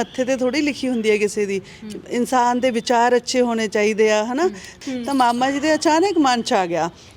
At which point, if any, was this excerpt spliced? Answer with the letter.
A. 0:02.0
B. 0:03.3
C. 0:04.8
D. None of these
C